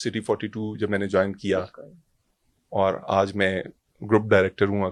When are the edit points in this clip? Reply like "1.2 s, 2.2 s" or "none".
none